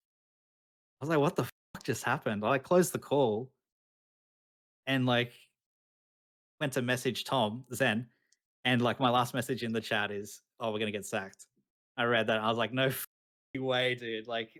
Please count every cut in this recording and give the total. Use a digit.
0